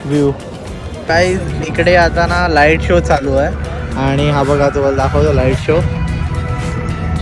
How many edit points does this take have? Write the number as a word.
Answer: one